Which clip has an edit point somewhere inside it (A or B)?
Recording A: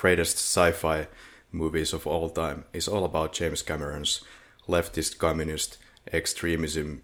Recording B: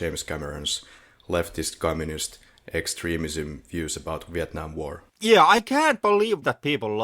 B